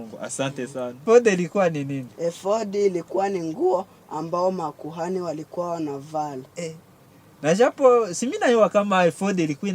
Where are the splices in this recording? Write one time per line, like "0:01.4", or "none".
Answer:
0:01.0